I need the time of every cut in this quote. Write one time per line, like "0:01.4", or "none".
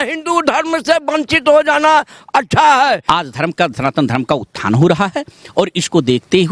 0:03.0